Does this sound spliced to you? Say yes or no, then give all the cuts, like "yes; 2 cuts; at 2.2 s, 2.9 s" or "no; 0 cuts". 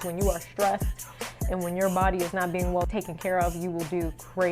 yes; 1 cut; at 2.9 s